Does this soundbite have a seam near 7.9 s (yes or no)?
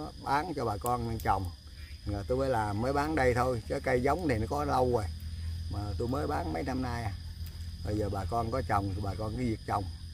no